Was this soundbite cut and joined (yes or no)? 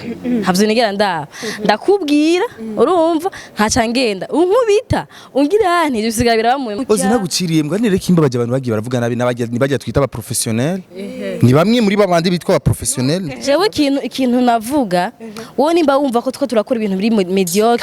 yes